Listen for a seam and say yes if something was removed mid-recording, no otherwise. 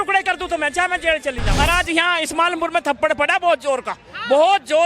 yes